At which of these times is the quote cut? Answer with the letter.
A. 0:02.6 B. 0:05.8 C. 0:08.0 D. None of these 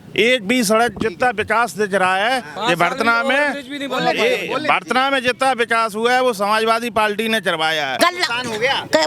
C